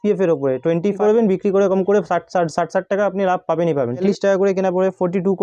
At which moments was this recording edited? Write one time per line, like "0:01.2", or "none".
0:01.0
0:04.0